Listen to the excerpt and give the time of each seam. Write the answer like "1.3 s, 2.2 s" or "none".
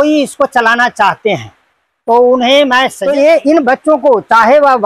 3.0 s